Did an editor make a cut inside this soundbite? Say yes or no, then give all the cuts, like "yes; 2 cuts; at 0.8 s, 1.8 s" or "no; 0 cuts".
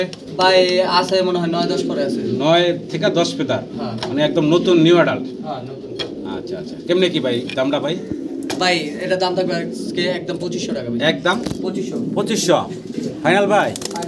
no; 0 cuts